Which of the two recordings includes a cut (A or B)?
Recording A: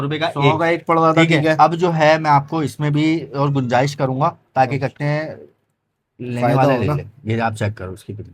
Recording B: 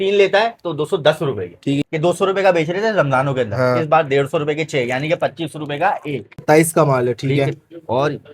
B